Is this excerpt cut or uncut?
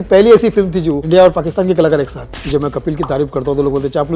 cut